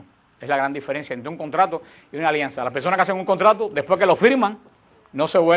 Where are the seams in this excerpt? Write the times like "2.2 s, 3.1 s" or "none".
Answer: 4.2 s